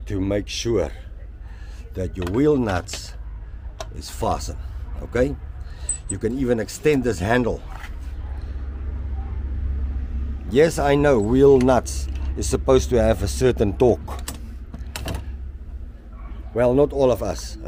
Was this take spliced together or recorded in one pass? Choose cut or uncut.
uncut